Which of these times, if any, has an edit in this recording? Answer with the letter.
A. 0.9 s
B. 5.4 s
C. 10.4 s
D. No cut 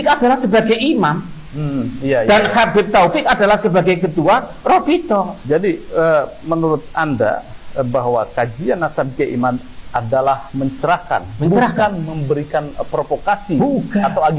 B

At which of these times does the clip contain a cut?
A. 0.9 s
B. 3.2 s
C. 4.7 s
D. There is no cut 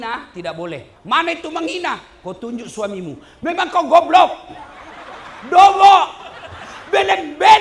A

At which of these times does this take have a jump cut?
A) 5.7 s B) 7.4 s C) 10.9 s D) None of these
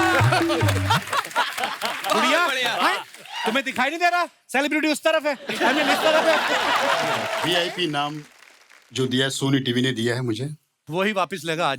B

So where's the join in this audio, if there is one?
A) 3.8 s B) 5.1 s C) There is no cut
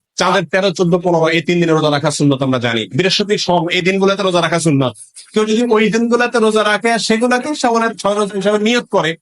C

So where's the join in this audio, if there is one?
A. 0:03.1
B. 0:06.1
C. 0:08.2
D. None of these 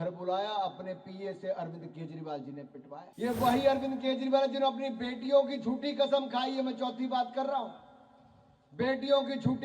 A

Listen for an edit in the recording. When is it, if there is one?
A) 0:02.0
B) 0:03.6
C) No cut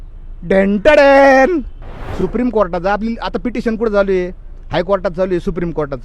A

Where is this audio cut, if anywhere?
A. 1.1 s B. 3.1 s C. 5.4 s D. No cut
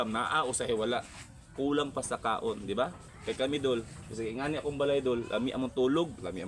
B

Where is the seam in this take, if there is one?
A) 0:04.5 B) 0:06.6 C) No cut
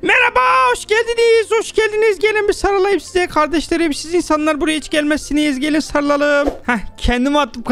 B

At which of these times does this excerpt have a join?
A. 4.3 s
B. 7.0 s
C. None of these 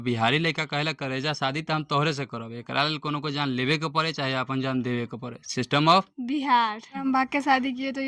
B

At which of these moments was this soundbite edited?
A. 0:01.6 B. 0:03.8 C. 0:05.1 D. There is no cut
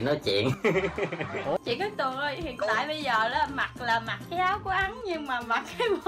A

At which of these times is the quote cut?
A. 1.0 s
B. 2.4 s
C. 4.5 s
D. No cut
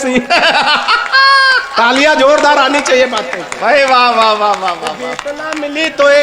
D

